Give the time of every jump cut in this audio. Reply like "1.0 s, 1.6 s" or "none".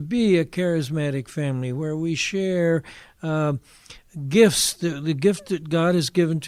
none